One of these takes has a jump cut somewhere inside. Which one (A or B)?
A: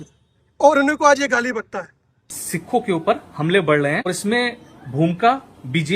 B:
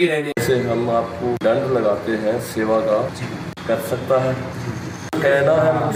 A